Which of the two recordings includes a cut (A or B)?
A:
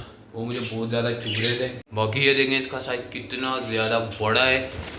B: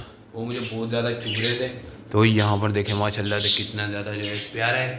A